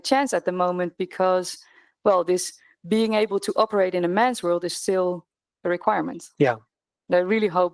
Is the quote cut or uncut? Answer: uncut